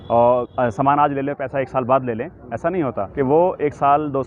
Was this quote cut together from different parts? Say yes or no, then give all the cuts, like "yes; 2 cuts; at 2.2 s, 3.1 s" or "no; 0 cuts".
yes; 1 cut; at 3.0 s